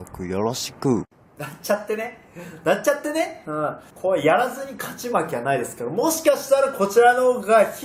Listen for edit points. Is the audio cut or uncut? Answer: cut